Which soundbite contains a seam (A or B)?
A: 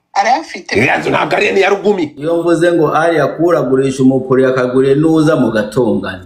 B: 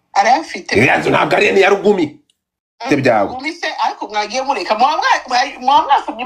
A